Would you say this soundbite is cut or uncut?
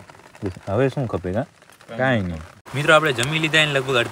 uncut